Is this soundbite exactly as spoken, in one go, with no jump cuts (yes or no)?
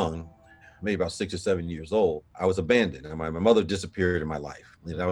no